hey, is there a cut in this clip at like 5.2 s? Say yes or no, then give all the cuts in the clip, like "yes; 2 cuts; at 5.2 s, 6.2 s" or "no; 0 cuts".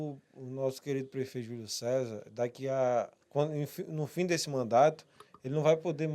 no; 1 cut; at 3.2 s